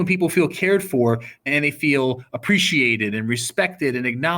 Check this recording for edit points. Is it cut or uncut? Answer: cut